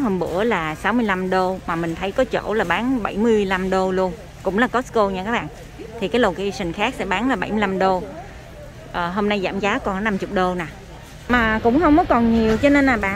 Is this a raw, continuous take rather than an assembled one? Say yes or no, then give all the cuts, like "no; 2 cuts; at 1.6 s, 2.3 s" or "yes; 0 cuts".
no; 1 cut; at 11.2 s